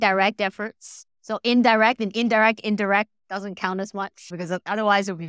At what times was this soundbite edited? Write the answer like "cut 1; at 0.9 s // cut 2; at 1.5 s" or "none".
none